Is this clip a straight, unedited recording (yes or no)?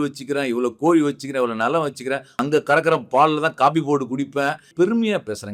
no